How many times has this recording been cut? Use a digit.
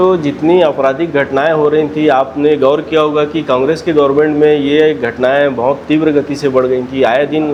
0